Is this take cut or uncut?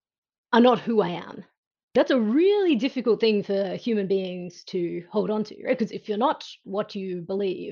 cut